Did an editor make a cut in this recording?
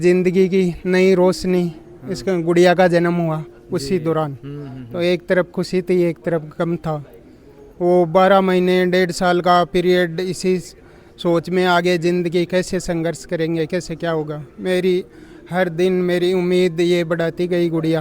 no; 0 cuts

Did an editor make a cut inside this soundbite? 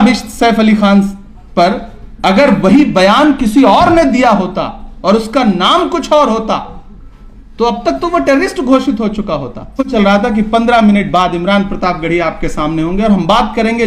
yes; 1 cut; at 9.9 s

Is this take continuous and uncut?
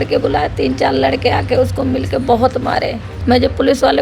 no; 1 cut; at 3.1 s

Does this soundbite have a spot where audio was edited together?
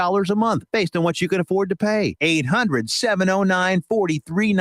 no; 0 cuts

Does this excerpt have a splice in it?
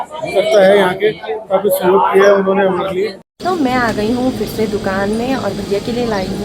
yes; 1 cut; at 3.2 s

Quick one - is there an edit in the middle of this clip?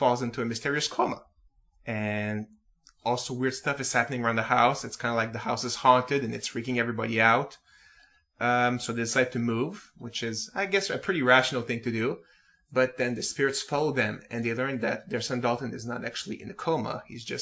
yes; 1 cut; at 7.2 s

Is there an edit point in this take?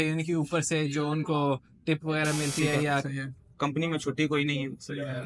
yes; 1 cut; at 3.1 s

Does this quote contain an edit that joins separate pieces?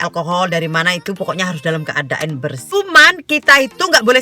yes; 1 cut; at 2.6 s

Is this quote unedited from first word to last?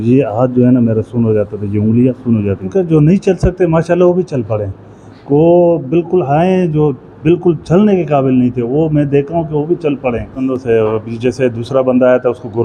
no; 2 cuts; at 2.7 s, 10.4 s

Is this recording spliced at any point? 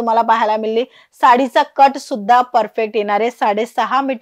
no; 0 cuts

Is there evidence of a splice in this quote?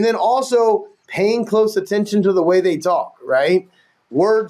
no; 0 cuts

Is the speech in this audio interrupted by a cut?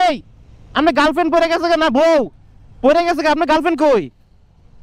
no; 0 cuts

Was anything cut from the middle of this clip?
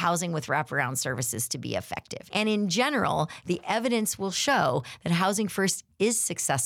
yes; 1 cut; at 2.1 s

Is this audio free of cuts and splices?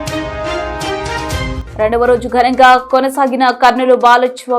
no; 1 cut; at 1.6 s

